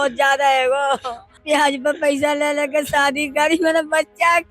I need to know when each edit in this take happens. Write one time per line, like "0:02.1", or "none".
0:01.4